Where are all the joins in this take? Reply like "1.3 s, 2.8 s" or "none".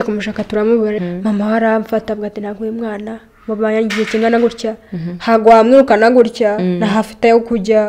1.0 s